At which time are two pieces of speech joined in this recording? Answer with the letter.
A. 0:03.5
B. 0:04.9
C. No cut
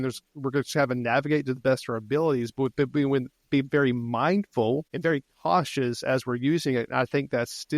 B